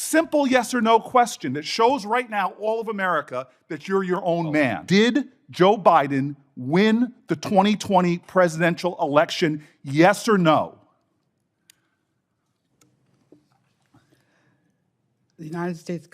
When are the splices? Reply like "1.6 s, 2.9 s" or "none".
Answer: 4.8 s